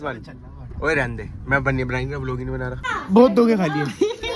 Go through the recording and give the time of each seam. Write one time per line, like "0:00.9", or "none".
0:02.9